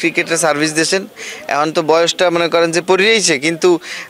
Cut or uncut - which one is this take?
uncut